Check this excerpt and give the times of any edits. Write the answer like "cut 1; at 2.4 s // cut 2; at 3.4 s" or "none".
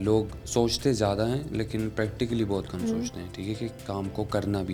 none